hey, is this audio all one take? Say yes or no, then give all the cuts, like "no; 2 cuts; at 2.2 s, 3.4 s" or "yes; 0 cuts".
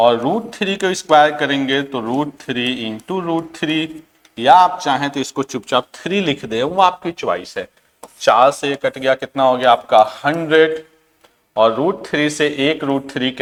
yes; 0 cuts